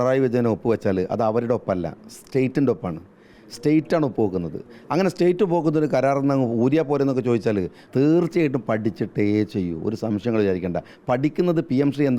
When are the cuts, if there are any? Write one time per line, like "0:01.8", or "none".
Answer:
0:07.8